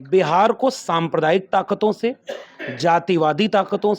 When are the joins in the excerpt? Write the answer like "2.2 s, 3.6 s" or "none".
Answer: none